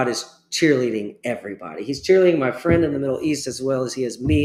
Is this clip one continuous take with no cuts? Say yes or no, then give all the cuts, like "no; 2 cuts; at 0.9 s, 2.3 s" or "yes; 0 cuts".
yes; 0 cuts